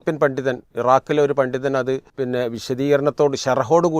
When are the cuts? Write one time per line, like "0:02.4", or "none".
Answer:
0:02.1